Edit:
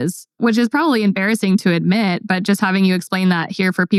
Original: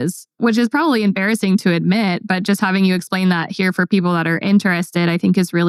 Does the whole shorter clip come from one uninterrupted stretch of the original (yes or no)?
yes